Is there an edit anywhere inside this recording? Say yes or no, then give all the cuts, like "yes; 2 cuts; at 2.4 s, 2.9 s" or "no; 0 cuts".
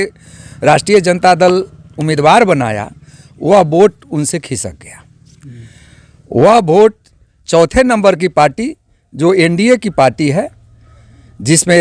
no; 0 cuts